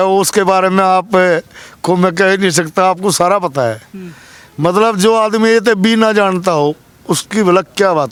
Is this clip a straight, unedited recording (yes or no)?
yes